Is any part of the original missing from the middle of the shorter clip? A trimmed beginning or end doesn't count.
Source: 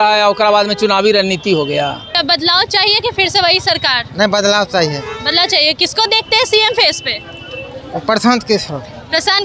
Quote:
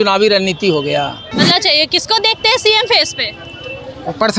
yes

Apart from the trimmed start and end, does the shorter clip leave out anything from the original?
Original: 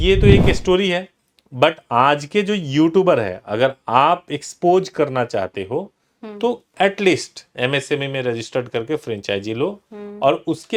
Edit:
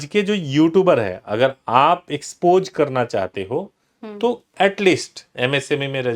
no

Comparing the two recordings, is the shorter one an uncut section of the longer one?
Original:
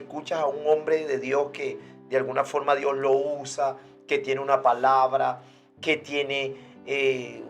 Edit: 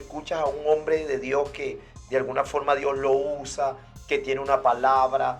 yes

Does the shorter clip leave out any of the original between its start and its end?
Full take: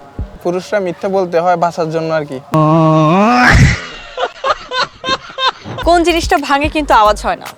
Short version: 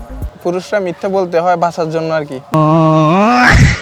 no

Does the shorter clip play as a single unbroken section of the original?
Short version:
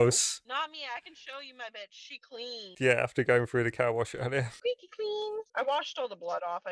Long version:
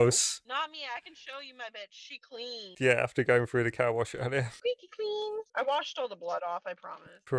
yes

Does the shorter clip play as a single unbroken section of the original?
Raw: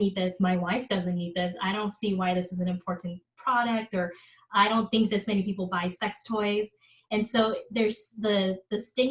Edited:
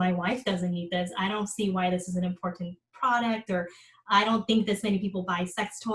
yes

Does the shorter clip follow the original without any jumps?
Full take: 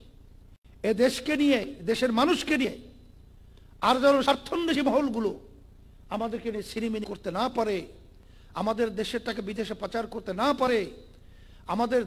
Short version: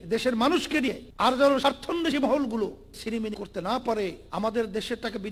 no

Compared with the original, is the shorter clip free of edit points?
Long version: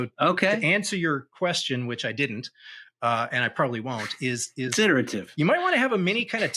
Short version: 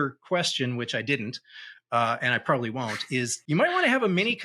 no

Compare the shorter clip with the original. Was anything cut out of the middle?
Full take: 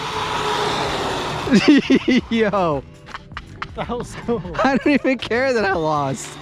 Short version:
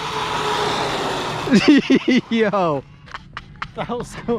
no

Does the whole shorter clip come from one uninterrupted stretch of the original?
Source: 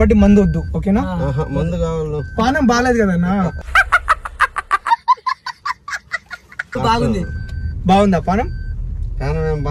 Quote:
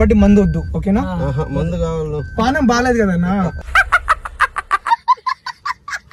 yes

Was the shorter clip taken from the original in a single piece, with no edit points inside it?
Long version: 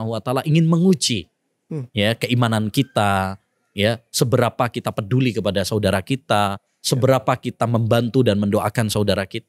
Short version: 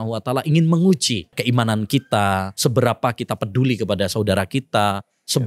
no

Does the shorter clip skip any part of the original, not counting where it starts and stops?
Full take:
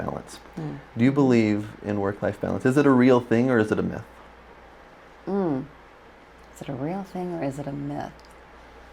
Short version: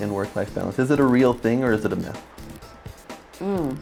no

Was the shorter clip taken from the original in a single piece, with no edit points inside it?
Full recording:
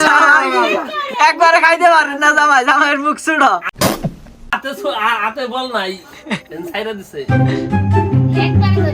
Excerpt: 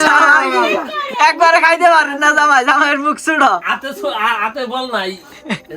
no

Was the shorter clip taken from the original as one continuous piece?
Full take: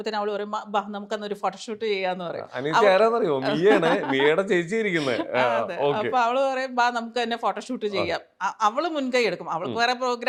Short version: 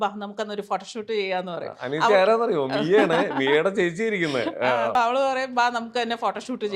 no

